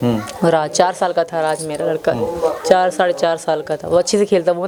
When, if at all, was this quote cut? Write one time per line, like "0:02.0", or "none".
none